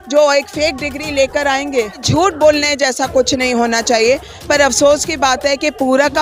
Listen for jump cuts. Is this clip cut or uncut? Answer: cut